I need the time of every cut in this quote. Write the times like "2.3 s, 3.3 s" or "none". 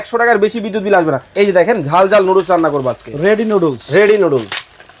1.2 s